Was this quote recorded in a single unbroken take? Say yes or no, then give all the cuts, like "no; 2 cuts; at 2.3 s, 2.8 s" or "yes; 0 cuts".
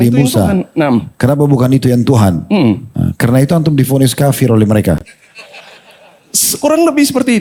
yes; 0 cuts